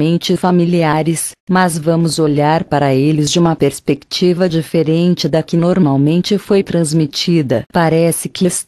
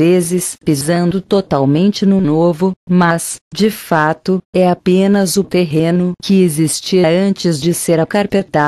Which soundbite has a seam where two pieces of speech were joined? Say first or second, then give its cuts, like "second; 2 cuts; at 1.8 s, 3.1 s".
first; 1 cut; at 7.3 s